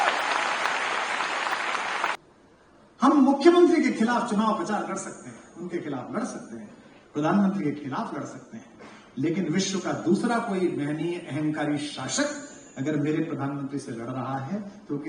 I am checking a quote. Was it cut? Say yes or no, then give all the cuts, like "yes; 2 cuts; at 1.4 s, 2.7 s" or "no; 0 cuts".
yes; 1 cut; at 2.2 s